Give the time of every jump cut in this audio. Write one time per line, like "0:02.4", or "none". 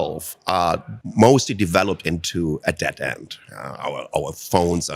0:01.0